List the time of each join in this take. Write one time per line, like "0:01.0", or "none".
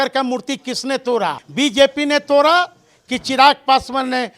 0:01.4